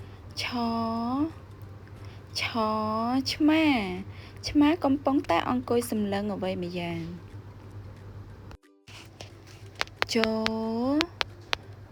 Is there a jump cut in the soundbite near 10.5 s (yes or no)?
no